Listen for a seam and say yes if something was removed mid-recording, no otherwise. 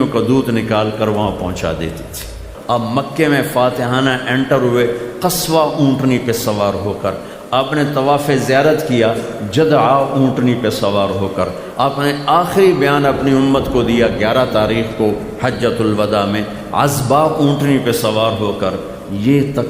yes